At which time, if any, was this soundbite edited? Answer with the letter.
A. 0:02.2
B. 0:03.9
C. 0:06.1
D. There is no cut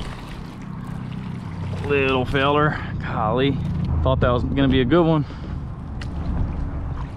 B